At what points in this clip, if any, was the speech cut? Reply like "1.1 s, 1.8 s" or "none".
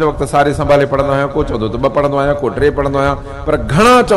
none